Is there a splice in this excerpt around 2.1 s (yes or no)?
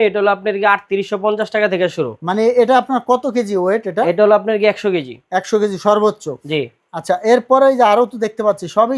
no